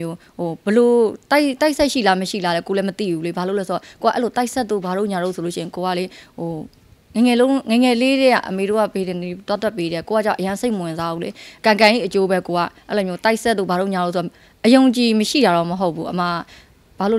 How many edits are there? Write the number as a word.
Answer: one